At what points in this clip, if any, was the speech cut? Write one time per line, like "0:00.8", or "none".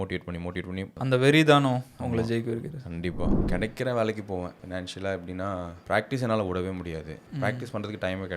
0:00.9
0:03.4
0:07.2